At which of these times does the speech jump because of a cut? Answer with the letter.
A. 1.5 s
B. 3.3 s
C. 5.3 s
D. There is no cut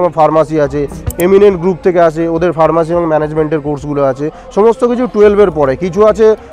D